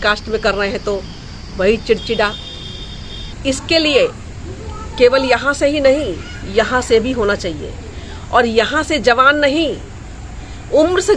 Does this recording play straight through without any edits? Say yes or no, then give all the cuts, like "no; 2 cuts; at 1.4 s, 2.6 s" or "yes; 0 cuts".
no; 1 cut; at 3.3 s